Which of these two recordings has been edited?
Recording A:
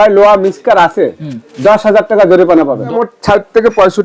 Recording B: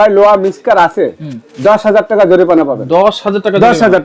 A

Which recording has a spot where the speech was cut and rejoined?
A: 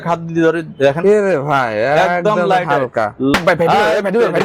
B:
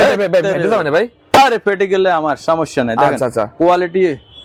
A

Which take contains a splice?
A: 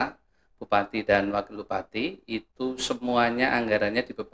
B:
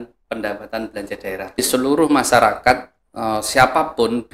B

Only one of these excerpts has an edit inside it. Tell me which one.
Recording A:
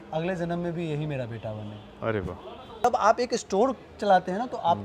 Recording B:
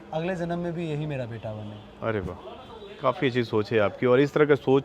A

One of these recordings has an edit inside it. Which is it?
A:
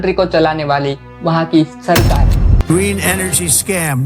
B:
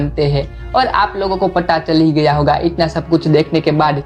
A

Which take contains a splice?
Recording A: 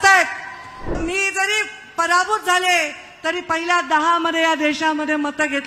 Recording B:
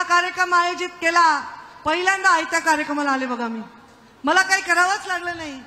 A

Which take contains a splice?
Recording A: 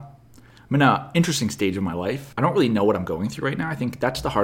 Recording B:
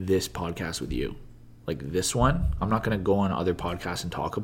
A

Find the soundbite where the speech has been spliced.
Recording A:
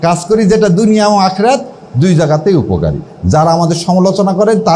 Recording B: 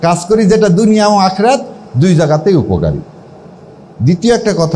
A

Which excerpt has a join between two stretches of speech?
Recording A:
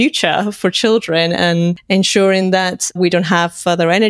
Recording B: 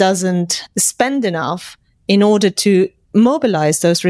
A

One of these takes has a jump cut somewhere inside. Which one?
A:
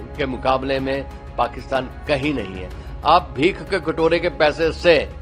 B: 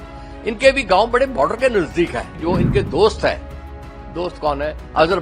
B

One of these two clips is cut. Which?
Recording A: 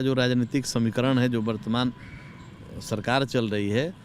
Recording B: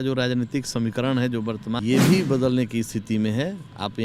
B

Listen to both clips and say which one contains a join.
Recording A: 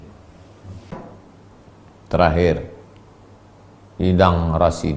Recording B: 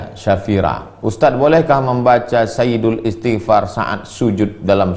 A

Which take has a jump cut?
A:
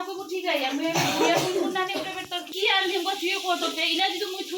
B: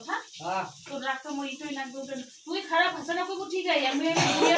A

